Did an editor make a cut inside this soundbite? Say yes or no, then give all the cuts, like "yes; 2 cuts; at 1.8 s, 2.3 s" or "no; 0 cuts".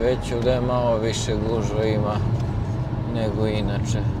no; 0 cuts